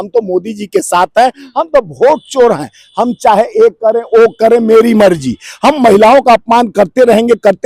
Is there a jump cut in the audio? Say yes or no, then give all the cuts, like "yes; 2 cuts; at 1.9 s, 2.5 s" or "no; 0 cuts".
no; 0 cuts